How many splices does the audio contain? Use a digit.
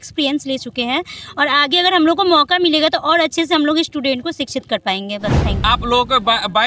1